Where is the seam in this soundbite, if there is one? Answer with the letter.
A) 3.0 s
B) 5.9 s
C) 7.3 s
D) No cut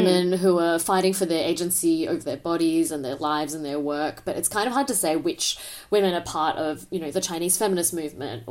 D